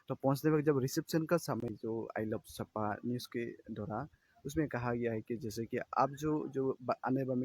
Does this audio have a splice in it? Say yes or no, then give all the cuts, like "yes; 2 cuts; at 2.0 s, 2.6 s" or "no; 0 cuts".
yes; 1 cut; at 1.6 s